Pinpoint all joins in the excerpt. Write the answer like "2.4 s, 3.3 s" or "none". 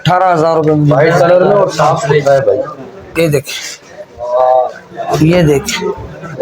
0.9 s

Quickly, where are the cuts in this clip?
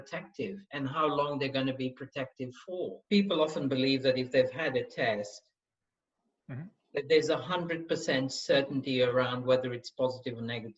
3.0 s

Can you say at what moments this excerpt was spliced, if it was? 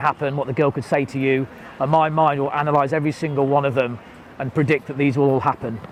none

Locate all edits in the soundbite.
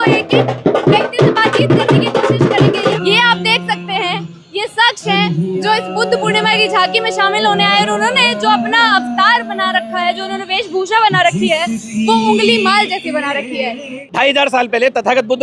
2.9 s, 13.9 s

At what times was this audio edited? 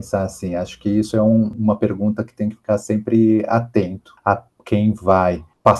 1.5 s, 4.0 s

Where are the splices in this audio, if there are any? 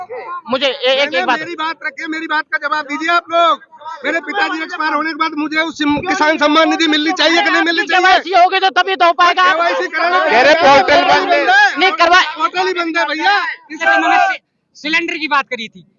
13.8 s

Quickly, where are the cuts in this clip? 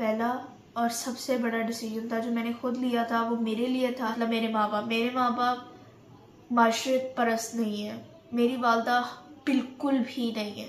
4.1 s

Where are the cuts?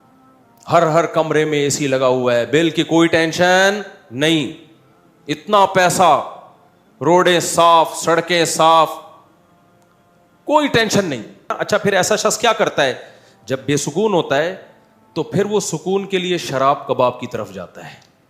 11.5 s

